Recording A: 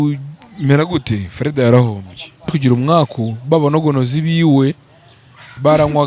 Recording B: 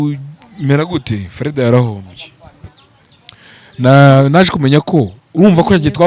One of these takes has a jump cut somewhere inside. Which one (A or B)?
A